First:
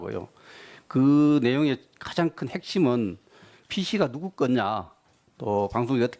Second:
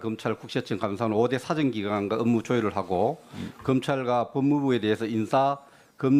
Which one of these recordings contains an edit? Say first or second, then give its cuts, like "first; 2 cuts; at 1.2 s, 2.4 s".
second; 1 cut; at 3.3 s